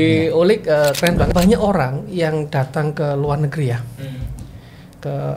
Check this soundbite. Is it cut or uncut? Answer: cut